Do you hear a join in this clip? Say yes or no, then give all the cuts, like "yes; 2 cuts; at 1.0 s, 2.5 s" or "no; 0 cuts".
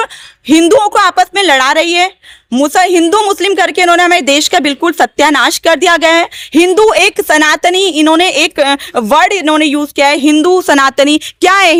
no; 0 cuts